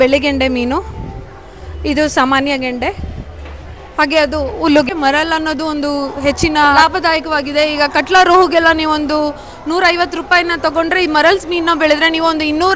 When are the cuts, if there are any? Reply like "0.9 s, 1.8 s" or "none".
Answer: 4.9 s, 6.7 s